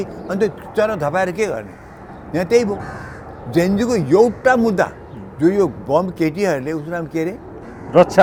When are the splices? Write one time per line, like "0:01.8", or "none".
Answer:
none